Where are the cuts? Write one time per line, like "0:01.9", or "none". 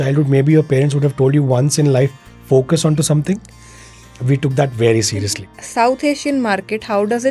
0:05.2